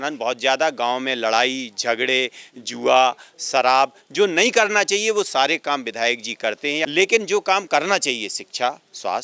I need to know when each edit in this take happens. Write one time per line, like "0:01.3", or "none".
0:06.8